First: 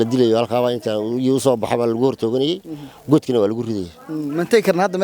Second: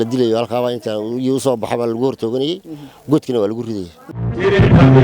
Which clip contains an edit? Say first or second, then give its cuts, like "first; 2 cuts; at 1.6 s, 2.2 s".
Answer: second; 1 cut; at 4.1 s